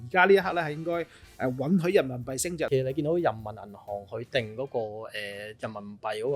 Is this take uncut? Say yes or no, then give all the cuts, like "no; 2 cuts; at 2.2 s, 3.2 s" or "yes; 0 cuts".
no; 1 cut; at 2.7 s